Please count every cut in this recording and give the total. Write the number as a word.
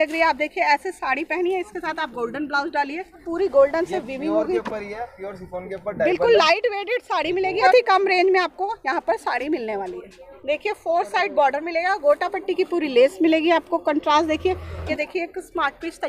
four